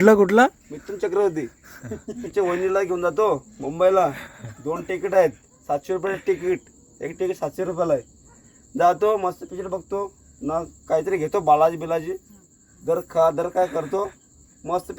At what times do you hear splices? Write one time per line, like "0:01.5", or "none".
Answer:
0:02.2